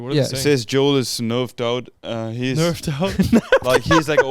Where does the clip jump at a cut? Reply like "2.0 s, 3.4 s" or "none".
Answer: none